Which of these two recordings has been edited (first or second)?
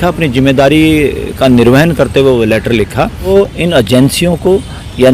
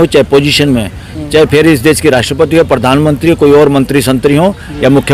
first